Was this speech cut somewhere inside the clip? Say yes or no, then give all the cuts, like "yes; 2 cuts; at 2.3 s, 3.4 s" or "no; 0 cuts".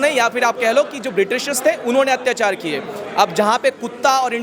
no; 0 cuts